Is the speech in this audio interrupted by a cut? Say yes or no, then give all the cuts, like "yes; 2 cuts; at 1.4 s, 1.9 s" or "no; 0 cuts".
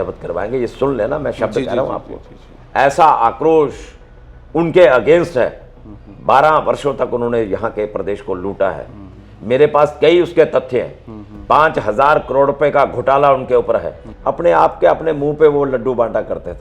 yes; 1 cut; at 14.1 s